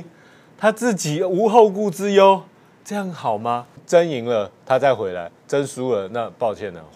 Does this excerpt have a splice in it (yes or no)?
yes